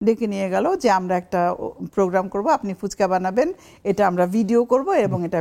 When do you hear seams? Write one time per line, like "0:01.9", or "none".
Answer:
none